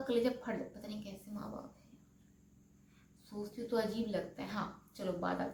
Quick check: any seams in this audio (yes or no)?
no